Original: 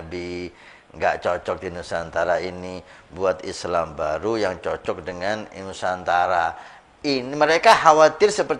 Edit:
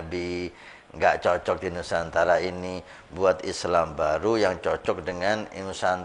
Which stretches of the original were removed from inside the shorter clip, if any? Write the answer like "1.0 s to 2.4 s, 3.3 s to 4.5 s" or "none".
none